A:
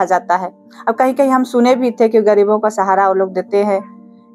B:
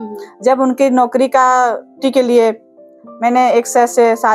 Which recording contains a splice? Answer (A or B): B